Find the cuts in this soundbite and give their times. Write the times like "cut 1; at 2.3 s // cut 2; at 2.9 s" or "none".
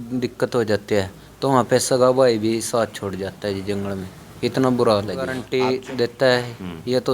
cut 1; at 5.4 s

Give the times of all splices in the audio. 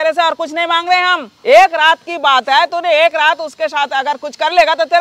cut 1; at 1.3 s

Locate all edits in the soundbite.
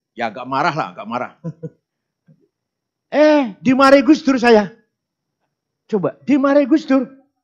none

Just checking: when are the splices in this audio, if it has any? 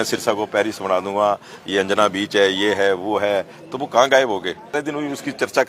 cut 1; at 4.7 s

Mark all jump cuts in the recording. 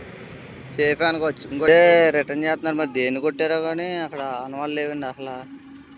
cut 1; at 1.7 s

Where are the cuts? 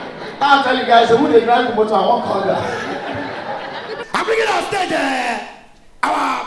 cut 1; at 4.0 s

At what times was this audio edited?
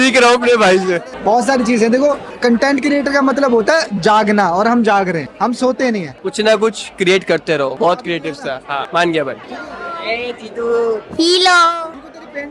none

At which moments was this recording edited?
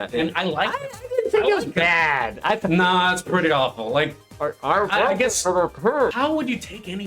cut 1; at 6.1 s

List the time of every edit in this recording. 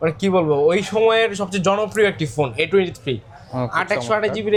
none

